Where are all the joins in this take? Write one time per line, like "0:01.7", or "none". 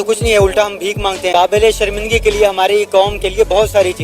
0:01.3